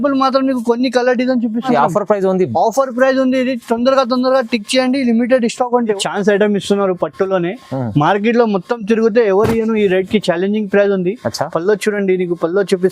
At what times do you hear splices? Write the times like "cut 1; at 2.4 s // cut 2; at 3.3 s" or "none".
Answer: cut 1; at 1.7 s // cut 2; at 6.0 s